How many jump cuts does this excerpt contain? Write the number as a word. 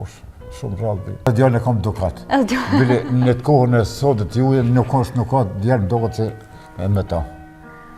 one